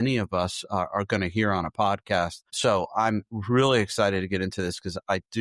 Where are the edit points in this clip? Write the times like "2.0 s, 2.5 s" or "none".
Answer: 2.5 s